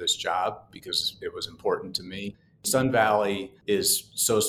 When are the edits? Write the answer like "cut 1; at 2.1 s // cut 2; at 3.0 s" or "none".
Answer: cut 1; at 2.7 s // cut 2; at 3.5 s